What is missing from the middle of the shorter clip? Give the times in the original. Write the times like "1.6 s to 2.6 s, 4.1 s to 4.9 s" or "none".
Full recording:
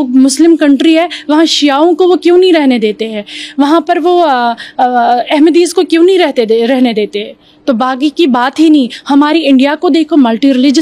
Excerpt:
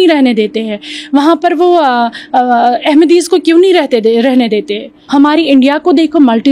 7.4 s to 9.0 s